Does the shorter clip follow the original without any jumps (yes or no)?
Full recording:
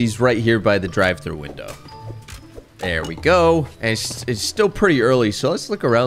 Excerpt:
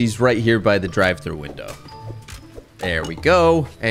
yes